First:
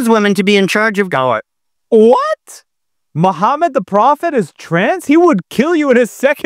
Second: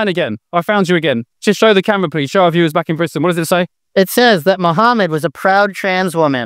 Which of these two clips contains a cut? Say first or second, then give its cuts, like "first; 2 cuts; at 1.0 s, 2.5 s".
first; 1 cut; at 1.6 s